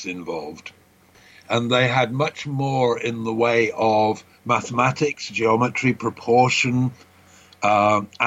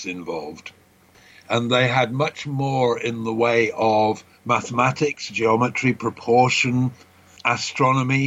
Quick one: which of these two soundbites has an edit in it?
second; 1 cut; at 7.4 s

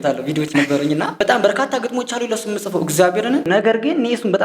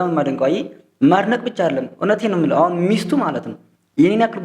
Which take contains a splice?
first; 2 cuts; at 1.2 s, 3.4 s

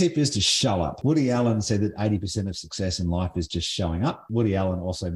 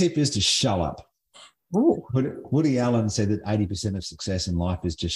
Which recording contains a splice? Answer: first; 2 cuts; at 0.9 s, 4.3 s

